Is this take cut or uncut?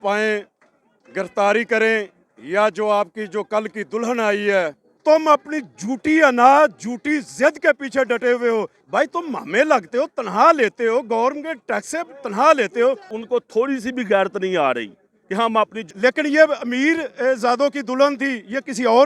cut